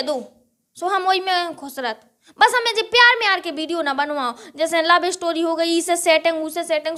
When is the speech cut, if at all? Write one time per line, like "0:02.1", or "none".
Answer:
none